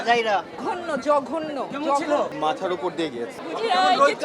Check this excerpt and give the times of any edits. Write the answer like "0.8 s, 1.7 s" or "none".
3.4 s